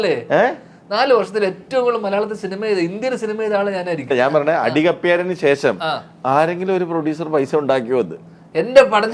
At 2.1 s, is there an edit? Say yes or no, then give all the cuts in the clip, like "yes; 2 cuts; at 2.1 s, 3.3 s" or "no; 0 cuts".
no; 1 cut; at 4.1 s